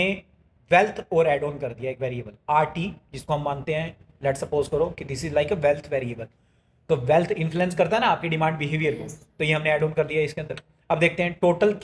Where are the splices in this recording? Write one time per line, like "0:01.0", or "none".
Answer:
none